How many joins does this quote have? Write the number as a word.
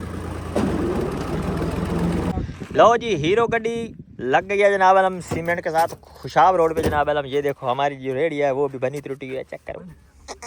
one